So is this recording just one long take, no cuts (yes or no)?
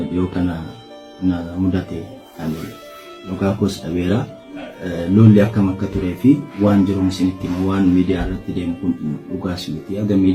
yes